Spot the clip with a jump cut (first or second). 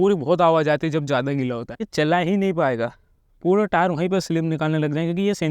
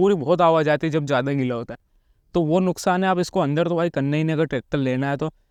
first